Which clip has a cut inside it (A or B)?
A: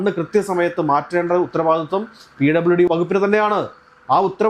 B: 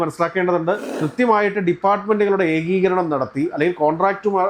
B